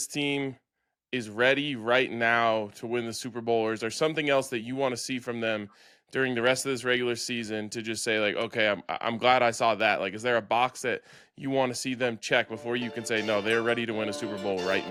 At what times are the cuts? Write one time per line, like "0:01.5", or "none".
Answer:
none